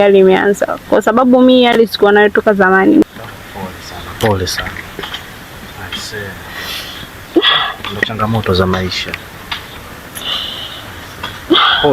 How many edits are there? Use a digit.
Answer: 1